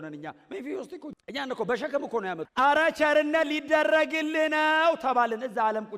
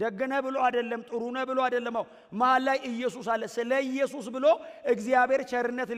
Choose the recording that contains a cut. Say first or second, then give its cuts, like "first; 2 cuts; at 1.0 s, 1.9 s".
first; 2 cuts; at 1.1 s, 2.5 s